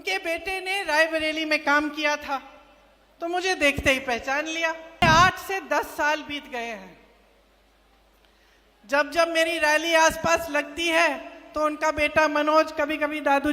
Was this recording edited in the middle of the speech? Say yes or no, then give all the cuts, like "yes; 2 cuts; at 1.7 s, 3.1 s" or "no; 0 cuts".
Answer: yes; 1 cut; at 5.0 s